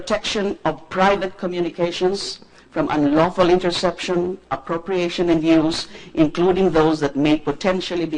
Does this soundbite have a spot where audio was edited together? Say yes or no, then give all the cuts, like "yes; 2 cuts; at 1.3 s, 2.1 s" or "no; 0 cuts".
yes; 1 cut; at 5.6 s